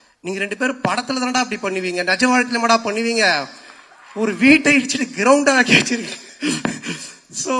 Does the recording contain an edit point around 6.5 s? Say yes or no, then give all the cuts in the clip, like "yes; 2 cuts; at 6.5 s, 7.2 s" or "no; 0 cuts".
no; 0 cuts